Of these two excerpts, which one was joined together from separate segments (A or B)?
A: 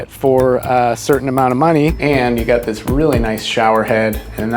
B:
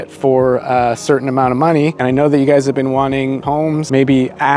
A